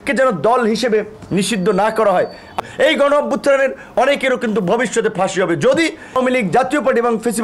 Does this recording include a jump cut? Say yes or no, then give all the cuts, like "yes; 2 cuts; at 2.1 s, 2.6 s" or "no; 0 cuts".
yes; 2 cuts; at 2.6 s, 6.2 s